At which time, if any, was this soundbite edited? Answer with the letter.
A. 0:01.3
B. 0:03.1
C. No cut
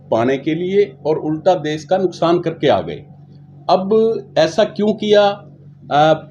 C